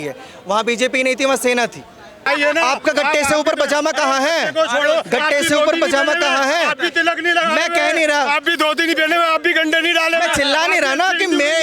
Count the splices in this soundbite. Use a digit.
1